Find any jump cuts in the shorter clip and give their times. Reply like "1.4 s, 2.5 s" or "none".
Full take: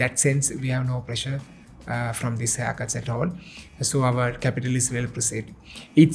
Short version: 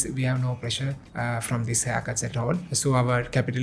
1.0 s, 2.7 s